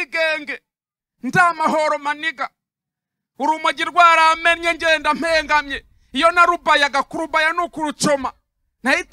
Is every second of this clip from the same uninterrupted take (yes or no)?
yes